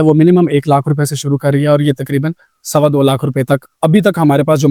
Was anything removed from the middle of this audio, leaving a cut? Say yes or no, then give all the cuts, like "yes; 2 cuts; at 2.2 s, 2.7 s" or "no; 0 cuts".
no; 0 cuts